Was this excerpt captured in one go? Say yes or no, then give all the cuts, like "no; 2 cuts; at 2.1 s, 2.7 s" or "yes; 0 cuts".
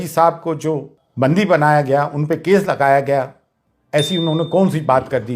no; 1 cut; at 1.0 s